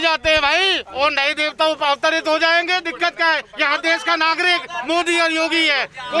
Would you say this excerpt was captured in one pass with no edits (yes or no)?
yes